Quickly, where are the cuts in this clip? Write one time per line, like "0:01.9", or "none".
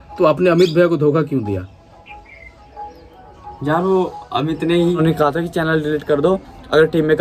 0:05.0